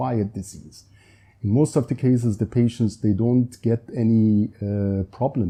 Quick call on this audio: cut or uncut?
uncut